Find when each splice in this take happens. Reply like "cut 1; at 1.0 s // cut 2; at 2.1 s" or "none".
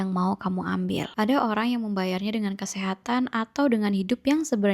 cut 1; at 1.1 s